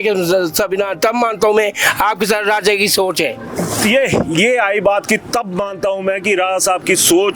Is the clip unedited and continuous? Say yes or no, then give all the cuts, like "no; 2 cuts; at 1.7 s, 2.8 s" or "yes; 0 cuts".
yes; 0 cuts